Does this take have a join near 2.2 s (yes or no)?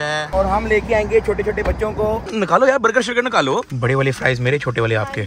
yes